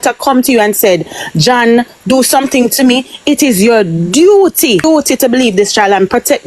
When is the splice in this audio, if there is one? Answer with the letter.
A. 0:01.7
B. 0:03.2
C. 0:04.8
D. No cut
C